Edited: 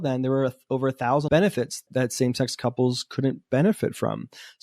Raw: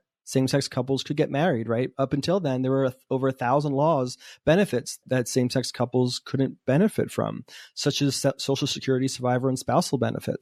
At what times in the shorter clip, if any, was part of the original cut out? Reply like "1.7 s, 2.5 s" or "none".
1.2 s